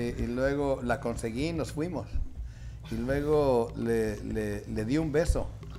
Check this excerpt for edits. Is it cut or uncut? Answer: uncut